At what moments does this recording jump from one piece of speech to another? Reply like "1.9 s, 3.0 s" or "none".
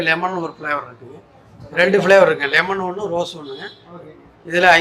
1.6 s